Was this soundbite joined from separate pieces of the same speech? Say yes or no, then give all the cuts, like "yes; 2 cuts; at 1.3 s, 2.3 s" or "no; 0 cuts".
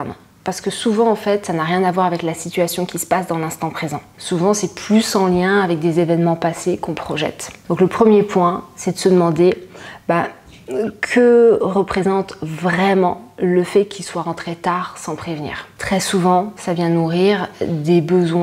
yes; 3 cuts; at 4.1 s, 7.5 s, 15.7 s